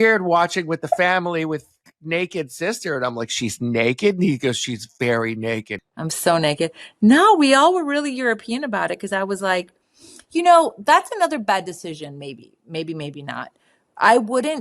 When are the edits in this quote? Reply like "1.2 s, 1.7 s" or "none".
5.8 s